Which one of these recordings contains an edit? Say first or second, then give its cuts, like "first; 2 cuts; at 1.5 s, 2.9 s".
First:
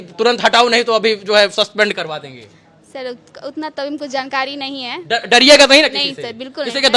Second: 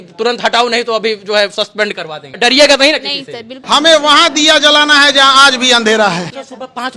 second; 3 cuts; at 2.3 s, 3.6 s, 6.2 s